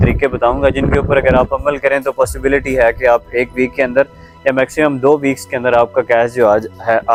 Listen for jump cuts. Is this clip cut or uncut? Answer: uncut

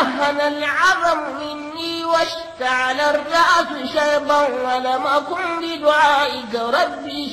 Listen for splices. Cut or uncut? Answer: uncut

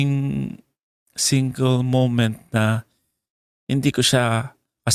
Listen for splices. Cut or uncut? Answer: uncut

